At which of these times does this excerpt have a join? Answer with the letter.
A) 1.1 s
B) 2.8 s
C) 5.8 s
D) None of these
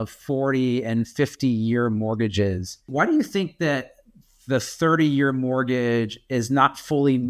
B